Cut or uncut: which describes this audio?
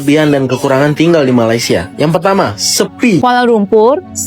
cut